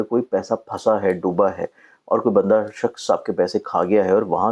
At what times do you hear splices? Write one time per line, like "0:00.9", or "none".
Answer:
none